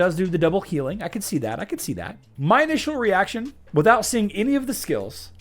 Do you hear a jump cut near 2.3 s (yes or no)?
yes